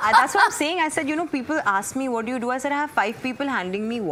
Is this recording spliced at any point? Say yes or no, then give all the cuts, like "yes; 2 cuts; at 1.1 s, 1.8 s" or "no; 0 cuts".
no; 0 cuts